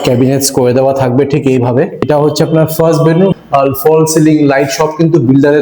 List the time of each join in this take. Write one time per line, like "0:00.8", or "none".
0:02.1
0:03.4